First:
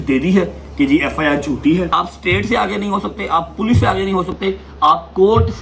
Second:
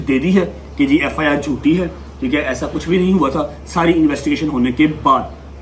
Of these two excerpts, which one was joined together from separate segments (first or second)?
first